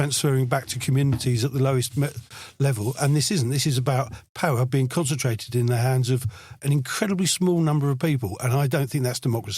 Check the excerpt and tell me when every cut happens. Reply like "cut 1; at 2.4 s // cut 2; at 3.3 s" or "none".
none